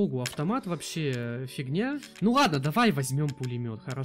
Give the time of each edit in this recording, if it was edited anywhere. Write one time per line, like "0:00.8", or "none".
0:02.1